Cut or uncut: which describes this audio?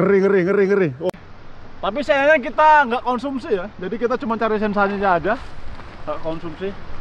cut